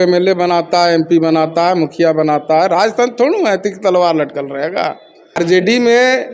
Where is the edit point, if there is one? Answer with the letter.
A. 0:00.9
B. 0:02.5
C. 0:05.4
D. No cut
C